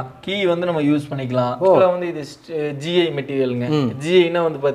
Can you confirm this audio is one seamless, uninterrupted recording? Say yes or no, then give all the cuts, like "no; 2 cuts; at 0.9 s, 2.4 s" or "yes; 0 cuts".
no; 1 cut; at 1.8 s